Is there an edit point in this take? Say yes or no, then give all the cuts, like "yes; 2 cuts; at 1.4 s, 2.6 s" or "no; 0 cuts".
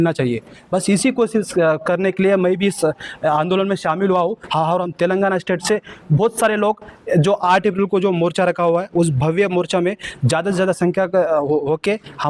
no; 0 cuts